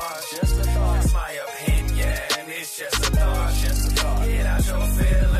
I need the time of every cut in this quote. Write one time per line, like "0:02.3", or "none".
none